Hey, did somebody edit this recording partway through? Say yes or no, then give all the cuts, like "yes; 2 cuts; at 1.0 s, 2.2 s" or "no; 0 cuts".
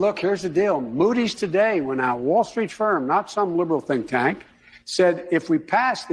yes; 1 cut; at 1.2 s